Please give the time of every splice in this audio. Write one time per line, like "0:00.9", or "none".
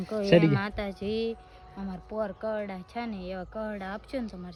none